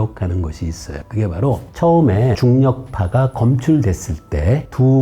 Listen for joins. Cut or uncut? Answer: uncut